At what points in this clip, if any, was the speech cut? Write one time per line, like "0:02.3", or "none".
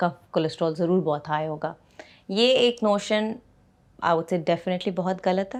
none